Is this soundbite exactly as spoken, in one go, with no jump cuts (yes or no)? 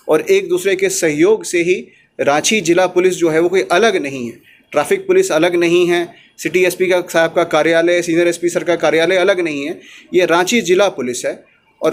yes